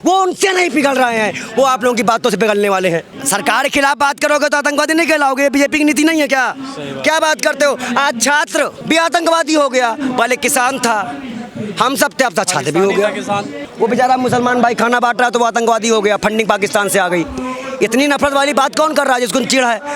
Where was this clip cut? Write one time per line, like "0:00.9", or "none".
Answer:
0:03.2
0:13.6